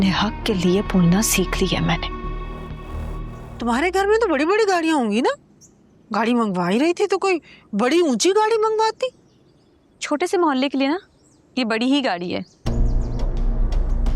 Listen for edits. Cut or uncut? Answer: cut